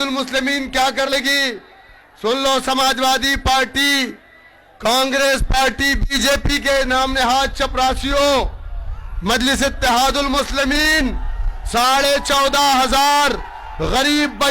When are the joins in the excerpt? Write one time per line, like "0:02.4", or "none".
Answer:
0:01.1